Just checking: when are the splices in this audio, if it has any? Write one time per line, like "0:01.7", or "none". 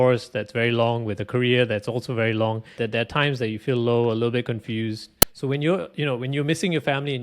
0:02.8
0:05.2